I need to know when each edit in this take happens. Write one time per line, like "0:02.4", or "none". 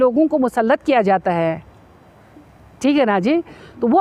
none